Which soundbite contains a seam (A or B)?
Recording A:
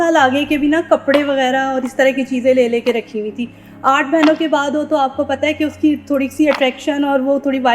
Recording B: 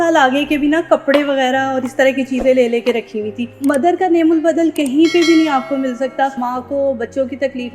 B